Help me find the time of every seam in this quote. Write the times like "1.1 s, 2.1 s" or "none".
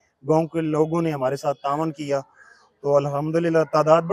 none